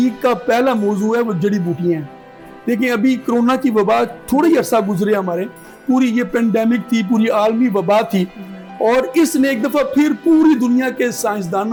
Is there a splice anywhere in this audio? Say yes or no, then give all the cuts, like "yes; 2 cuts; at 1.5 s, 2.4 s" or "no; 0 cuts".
no; 0 cuts